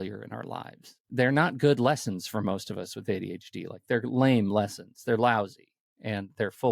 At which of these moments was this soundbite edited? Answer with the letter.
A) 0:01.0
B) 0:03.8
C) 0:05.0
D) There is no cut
A